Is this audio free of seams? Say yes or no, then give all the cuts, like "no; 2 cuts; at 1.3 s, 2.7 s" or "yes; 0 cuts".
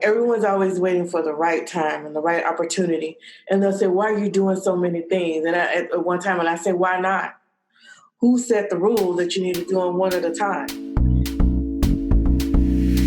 no; 1 cut; at 10.7 s